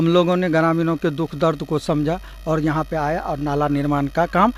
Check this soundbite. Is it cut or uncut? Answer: uncut